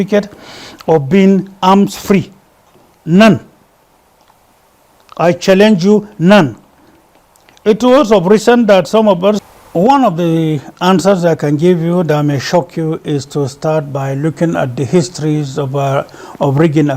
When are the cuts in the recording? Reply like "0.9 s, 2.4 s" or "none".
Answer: 9.4 s